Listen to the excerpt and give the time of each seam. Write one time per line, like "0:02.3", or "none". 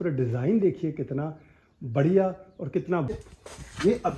0:03.2